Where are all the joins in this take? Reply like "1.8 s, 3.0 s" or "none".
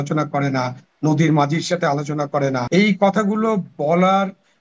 2.6 s